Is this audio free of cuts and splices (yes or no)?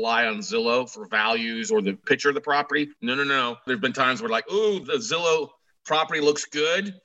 no